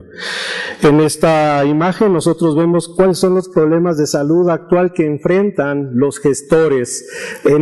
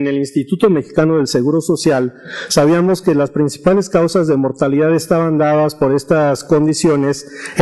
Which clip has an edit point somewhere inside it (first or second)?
second